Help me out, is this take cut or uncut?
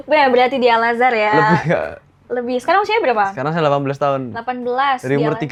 uncut